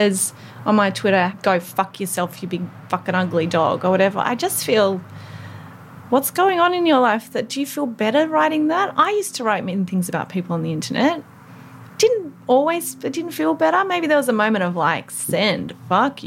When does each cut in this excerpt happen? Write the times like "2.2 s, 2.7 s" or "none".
1.3 s

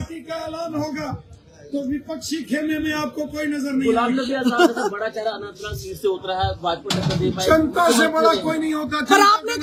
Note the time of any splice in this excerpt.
none

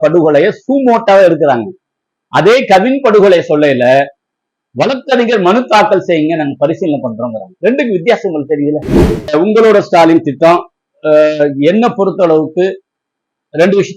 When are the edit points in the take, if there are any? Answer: 9.3 s

